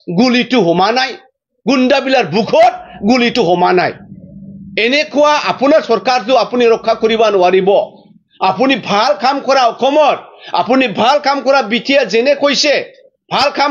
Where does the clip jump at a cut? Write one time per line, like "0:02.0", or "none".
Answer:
none